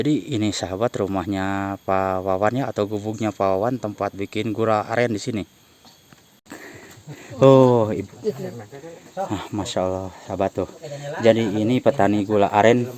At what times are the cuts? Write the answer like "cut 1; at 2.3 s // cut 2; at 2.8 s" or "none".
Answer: cut 1; at 6.5 s